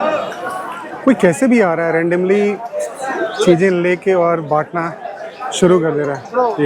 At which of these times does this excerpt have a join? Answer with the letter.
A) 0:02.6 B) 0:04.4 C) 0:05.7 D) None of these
D